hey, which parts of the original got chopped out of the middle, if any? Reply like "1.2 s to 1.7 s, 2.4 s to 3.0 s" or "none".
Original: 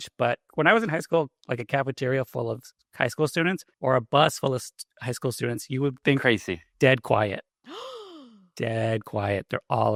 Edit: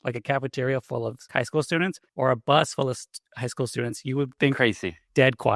2.6 s to 2.9 s